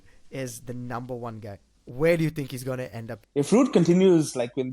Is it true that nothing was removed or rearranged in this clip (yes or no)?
no